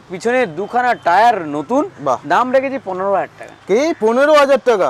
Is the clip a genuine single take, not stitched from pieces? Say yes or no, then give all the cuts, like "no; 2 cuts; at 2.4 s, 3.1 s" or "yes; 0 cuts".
yes; 0 cuts